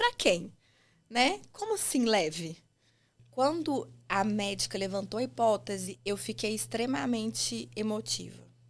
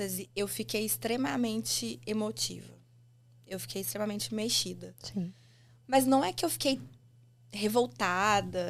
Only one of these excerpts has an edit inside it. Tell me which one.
first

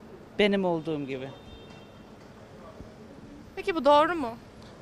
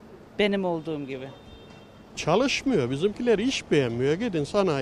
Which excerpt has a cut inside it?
second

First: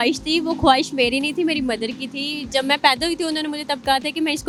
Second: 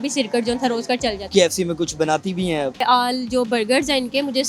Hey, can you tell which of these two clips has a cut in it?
second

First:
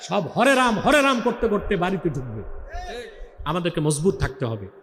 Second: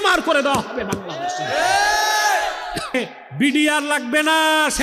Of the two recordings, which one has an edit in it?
second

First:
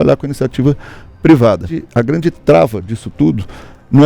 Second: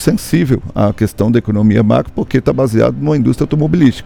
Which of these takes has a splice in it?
first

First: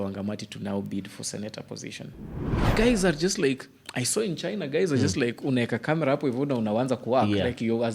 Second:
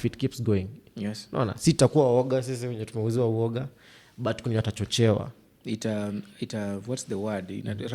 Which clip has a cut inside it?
first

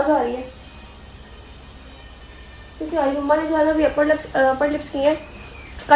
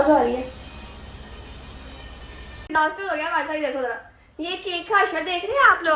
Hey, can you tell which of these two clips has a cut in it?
second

